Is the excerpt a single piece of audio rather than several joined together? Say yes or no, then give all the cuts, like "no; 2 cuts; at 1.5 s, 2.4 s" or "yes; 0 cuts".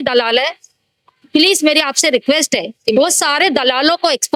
yes; 0 cuts